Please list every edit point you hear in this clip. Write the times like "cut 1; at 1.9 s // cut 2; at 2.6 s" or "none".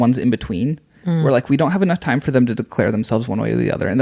none